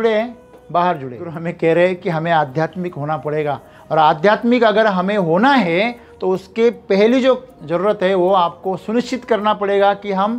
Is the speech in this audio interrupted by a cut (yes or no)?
yes